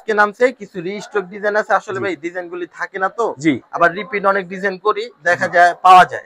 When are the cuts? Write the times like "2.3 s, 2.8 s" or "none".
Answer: none